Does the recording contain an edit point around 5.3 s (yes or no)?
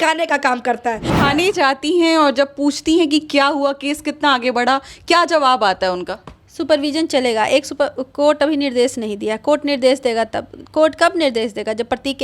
no